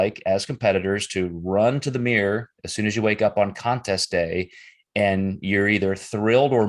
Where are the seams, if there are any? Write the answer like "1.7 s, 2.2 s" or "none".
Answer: none